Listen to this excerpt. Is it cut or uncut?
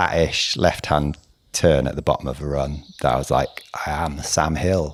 uncut